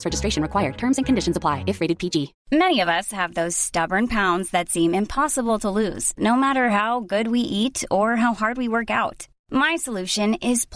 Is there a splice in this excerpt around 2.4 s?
yes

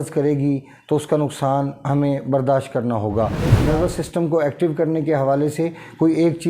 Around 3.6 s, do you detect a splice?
yes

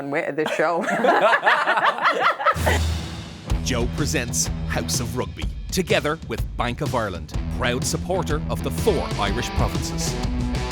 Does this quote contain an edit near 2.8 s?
yes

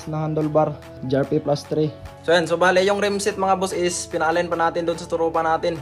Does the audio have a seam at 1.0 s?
yes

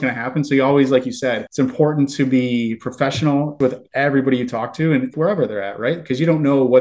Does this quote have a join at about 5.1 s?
yes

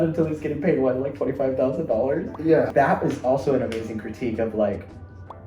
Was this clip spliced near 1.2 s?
no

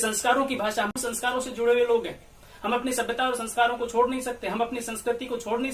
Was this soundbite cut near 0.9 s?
yes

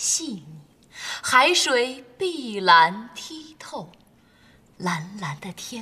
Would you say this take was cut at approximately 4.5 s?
yes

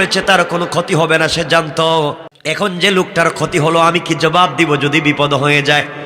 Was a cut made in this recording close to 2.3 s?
yes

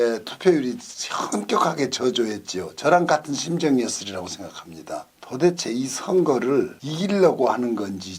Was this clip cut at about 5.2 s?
yes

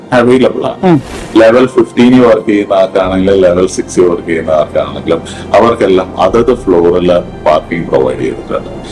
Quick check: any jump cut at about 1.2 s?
yes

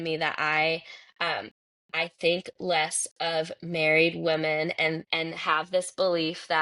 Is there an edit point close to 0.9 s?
no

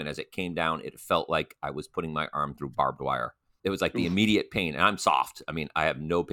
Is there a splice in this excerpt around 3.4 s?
yes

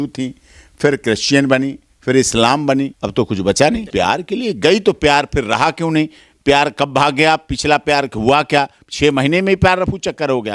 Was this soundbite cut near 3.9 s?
yes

